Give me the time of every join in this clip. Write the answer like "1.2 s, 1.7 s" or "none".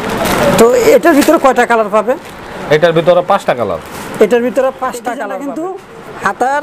5.3 s